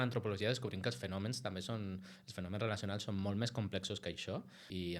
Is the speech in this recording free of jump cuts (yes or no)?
yes